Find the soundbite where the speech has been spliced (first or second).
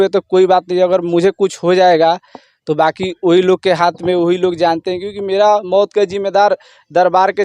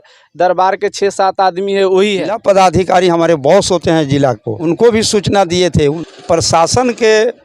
second